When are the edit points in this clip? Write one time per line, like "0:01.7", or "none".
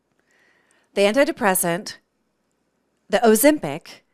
none